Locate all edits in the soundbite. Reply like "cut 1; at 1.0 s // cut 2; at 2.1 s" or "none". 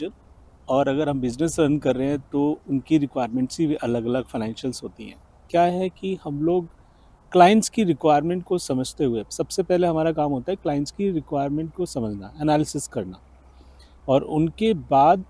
cut 1; at 5.4 s